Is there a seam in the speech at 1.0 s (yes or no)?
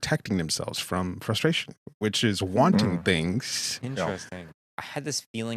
no